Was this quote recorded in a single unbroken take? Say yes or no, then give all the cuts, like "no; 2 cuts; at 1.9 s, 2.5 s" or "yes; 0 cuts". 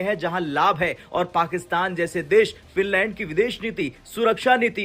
yes; 0 cuts